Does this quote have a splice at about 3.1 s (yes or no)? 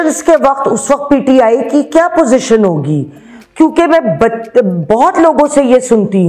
no